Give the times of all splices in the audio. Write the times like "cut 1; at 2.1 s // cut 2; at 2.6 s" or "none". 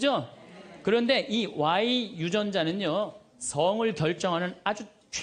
none